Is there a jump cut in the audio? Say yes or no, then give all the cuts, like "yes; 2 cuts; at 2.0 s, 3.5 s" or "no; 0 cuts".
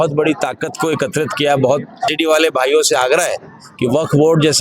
yes; 1 cut; at 2.1 s